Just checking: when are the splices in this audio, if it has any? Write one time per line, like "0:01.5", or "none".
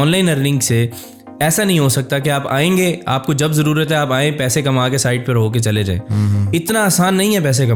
none